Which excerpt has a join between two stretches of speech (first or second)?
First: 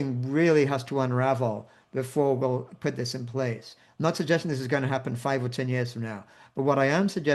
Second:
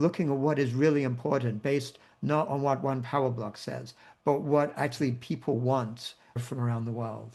second